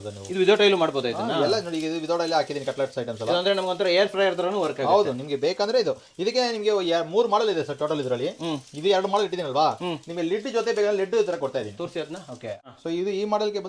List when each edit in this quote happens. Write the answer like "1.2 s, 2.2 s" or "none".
none